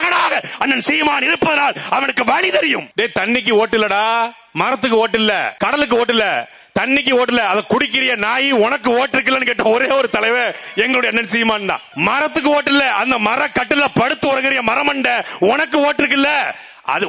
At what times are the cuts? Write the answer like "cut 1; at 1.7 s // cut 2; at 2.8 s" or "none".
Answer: cut 1; at 2.9 s // cut 2; at 5.5 s // cut 3; at 11.9 s

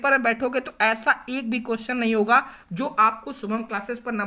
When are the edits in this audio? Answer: none

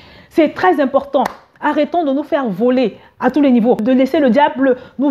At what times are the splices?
cut 1; at 3.8 s

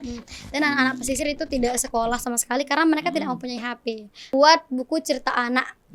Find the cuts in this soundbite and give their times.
cut 1; at 4.3 s

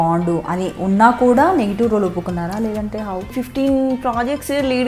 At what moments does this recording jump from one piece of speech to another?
cut 1; at 3.3 s

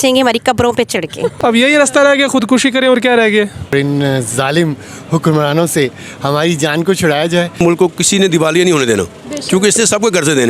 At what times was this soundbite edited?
cut 1; at 1.3 s // cut 2; at 3.7 s // cut 3; at 7.5 s

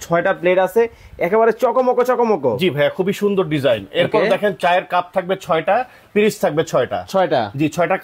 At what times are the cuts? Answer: none

